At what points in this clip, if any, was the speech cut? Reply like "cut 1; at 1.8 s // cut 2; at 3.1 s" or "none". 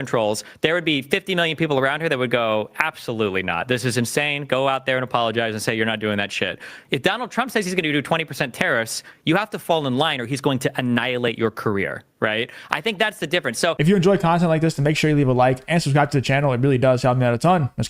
cut 1; at 13.8 s

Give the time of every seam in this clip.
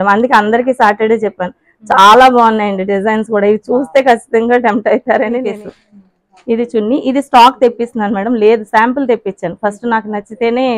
cut 1; at 5.5 s

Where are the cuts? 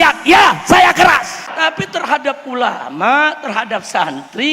cut 1; at 1.5 s

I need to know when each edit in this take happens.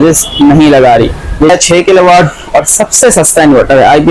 cut 1; at 1.6 s

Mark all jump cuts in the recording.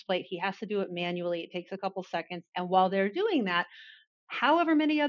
cut 1; at 2.4 s

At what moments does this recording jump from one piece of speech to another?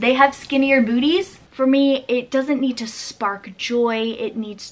cut 1; at 1.3 s

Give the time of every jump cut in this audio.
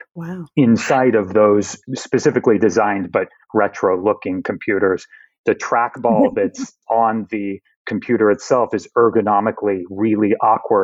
cut 1; at 1.9 s // cut 2; at 5.3 s // cut 3; at 6.8 s

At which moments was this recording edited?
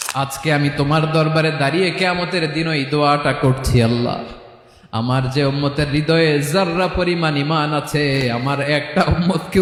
none

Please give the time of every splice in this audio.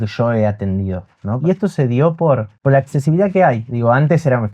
cut 1; at 1.4 s // cut 2; at 2.5 s

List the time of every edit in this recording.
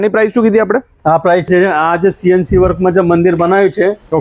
cut 1; at 1.5 s

